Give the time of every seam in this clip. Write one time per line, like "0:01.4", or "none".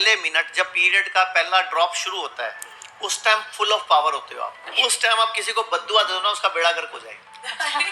0:04.6